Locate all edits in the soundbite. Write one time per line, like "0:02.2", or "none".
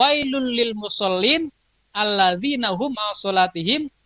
none